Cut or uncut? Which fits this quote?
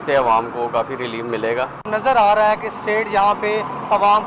uncut